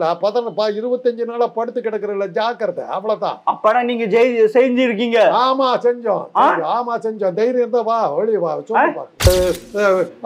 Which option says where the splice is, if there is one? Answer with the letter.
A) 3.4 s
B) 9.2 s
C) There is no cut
B